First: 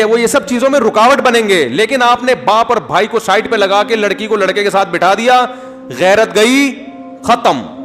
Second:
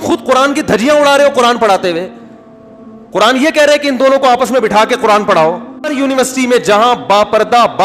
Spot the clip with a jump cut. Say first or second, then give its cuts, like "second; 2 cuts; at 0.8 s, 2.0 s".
second; 1 cut; at 5.8 s